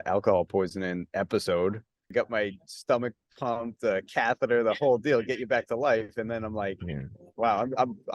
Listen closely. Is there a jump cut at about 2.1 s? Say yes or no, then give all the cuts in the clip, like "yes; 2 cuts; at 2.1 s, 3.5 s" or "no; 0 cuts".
yes; 1 cut; at 2.1 s